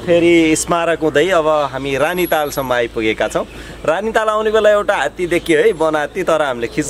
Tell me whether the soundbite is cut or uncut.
uncut